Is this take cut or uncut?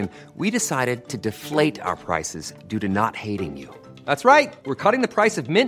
uncut